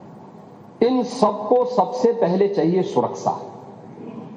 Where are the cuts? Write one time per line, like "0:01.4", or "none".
0:01.6